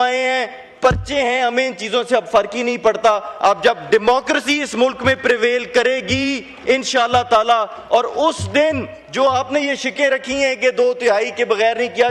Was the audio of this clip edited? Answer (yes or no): no